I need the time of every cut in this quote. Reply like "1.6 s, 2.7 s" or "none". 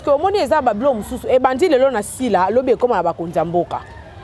none